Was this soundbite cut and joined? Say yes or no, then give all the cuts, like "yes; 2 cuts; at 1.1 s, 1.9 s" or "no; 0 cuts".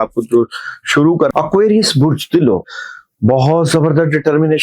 yes; 2 cuts; at 1.3 s, 2.6 s